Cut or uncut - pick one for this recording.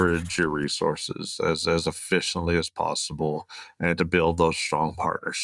uncut